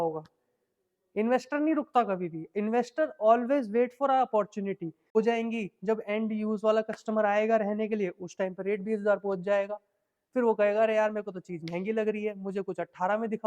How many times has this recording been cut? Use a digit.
1